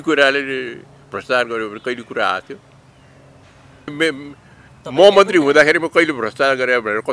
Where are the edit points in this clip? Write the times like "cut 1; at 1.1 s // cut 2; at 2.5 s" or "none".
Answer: cut 1; at 3.9 s